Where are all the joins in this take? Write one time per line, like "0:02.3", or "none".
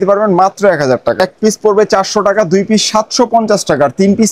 0:01.2